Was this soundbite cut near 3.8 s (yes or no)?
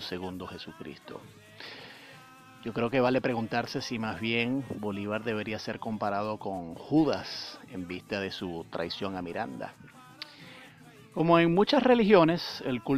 no